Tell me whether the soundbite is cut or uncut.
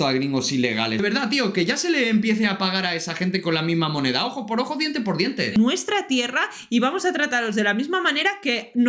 cut